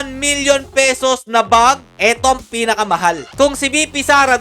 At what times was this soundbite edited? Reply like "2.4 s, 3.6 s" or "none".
1.9 s